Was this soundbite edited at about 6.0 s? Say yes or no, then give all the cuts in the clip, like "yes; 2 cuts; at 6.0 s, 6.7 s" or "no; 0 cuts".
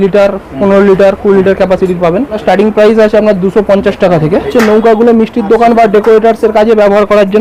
no; 2 cuts; at 2.4 s, 4.5 s